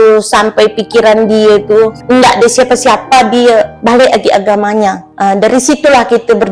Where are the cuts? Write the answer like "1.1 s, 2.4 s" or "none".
2.0 s, 3.7 s, 5.1 s

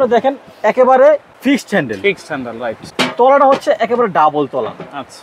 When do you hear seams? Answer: 1.3 s, 2.9 s

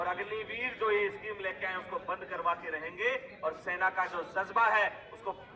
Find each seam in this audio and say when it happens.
none

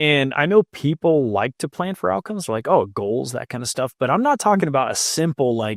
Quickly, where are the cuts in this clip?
none

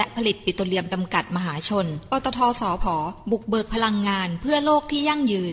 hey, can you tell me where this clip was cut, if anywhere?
none

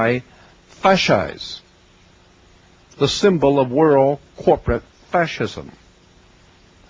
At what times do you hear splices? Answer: none

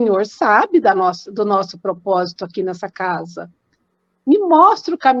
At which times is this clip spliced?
none

